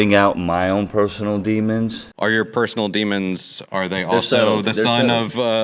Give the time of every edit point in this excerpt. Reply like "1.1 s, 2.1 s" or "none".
2.0 s